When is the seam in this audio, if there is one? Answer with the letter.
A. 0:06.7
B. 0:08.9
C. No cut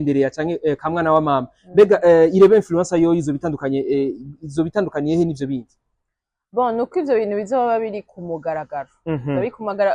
C